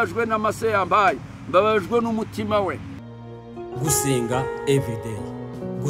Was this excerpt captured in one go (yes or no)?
no